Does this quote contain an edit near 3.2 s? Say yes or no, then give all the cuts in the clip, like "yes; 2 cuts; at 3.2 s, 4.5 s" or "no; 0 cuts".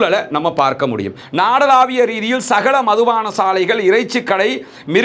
no; 1 cut; at 1.2 s